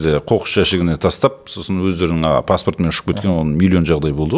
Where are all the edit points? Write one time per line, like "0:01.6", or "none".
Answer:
none